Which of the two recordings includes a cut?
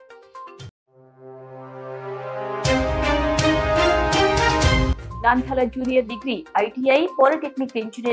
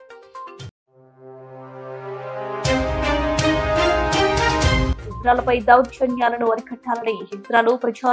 first; 1 cut; at 4.9 s

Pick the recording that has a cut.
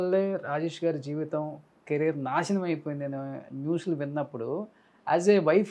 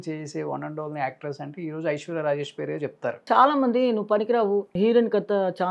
second; 2 cuts; at 3.2 s, 4.7 s

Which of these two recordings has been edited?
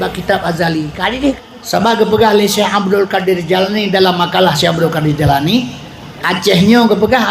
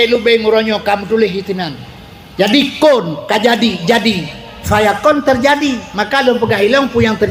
first; 1 cut; at 1.4 s

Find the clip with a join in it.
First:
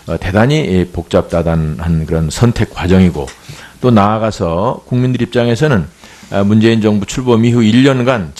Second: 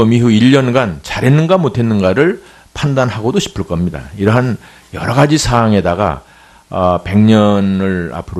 first; 1 cut; at 4.9 s

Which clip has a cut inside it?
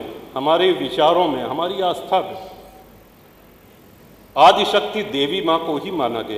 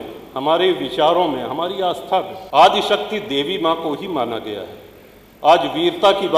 second; 1 cut; at 2.4 s

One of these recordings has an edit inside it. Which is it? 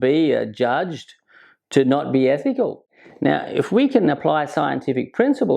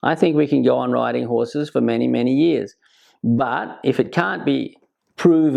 first; 1 cut; at 2.8 s

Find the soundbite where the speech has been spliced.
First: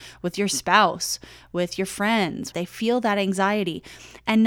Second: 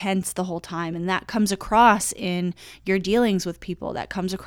first; 1 cut; at 2.5 s

